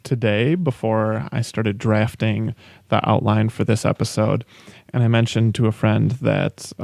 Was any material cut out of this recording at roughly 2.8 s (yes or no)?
no